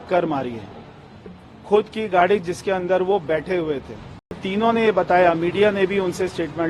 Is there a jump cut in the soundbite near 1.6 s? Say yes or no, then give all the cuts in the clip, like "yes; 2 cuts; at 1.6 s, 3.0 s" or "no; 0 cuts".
no; 1 cut; at 4.5 s